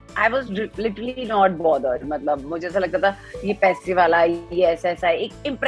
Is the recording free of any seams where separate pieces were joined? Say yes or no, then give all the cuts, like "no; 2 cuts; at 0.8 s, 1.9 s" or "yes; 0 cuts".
yes; 0 cuts